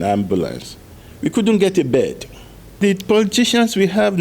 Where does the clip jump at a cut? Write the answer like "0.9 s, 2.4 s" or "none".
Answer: 2.8 s